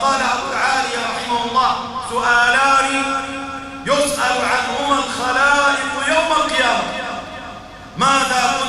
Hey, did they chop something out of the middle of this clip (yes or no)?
no